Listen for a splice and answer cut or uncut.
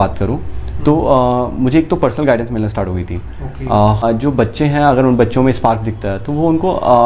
cut